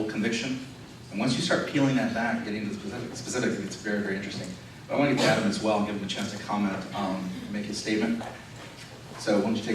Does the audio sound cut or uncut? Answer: cut